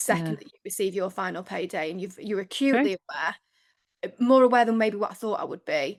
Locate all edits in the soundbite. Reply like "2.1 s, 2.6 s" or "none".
none